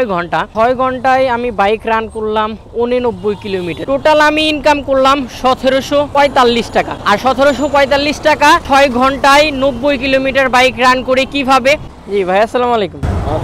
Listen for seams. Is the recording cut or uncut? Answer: cut